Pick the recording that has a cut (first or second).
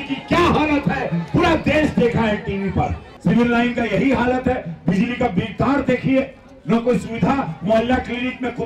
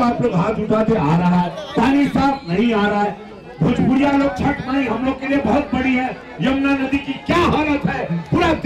first